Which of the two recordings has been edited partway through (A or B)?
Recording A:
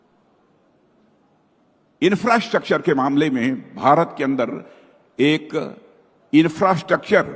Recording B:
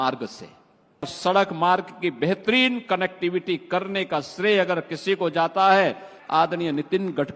B